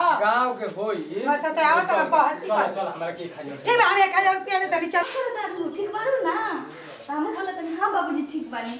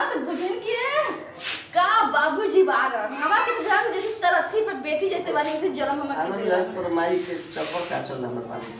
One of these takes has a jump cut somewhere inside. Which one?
first; 1 cut; at 5.0 s

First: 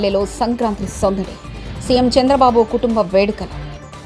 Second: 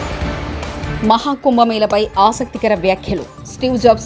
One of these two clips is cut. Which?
second; 1 cut; at 1.0 s

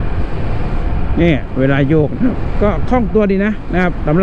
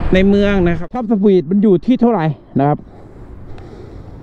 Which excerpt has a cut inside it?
second; 1 cut; at 1.0 s

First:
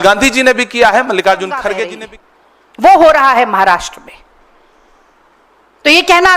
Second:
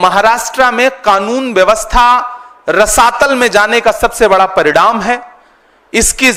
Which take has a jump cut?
first; 1 cut; at 1.9 s

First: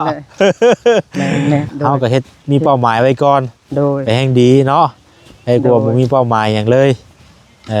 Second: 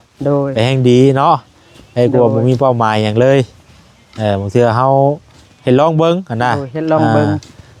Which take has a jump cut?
first; 1 cut; at 1.7 s

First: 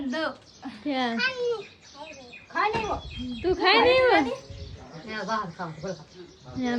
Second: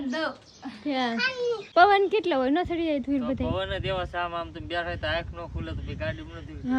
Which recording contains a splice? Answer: second; 1 cut; at 1.6 s

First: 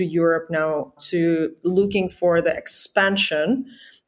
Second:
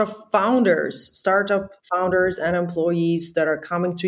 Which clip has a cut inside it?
first; 1 cut; at 1.0 s

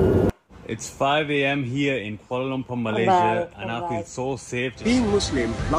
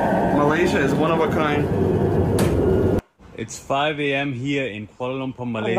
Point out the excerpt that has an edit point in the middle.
first; 1 cut; at 4.8 s

